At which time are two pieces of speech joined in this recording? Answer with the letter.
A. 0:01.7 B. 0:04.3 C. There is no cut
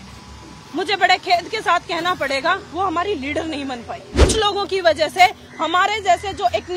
B